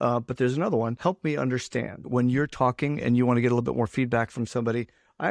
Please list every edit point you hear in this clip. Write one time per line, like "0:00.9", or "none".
0:01.0
0:02.0